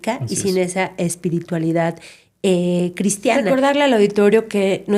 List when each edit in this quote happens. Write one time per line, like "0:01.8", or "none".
0:03.5

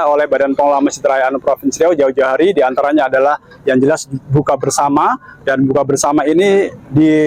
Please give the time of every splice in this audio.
none

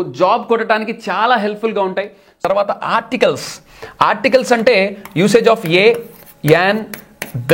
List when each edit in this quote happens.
0:02.4

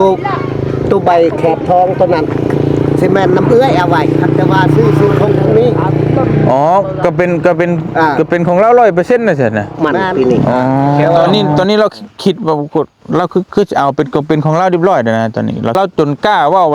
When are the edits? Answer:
0:11.2
0:15.8

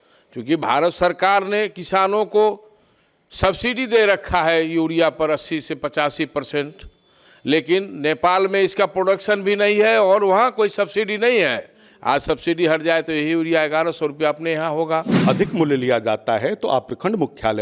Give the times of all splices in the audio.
0:15.1

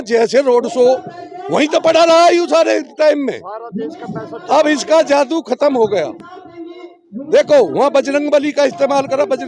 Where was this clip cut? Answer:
none

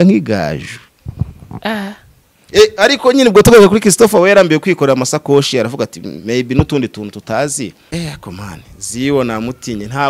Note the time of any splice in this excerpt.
0:07.8

